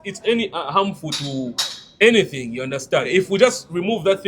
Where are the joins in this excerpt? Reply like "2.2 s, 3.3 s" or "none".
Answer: 3.1 s